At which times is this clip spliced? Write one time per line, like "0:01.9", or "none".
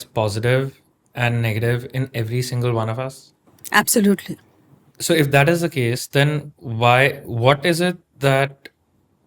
none